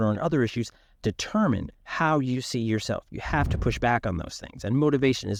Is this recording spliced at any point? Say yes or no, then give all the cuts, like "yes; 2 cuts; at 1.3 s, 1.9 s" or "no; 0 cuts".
no; 0 cuts